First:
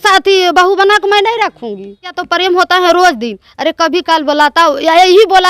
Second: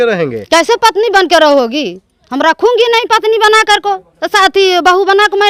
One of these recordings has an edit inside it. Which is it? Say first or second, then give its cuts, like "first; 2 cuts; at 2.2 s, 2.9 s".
first; 1 cut; at 2.2 s